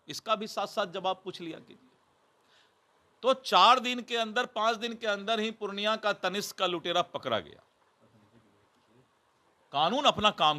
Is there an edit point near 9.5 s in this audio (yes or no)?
no